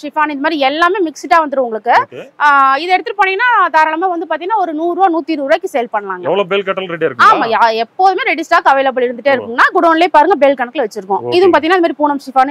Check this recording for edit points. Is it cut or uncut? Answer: uncut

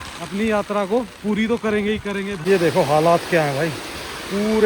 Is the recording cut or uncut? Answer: cut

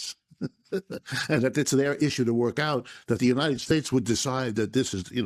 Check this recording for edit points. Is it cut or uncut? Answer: uncut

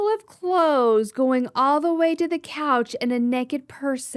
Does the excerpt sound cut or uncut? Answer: uncut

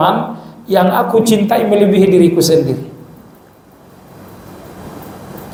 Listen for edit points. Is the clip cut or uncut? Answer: uncut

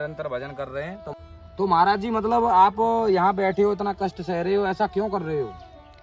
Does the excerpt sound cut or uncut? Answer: cut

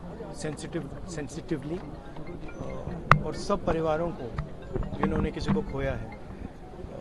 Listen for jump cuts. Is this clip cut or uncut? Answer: uncut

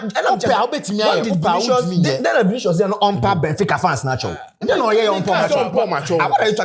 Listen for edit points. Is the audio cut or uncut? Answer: uncut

